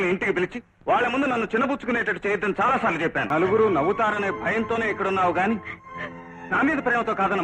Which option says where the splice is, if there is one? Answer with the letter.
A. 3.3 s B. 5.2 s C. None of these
A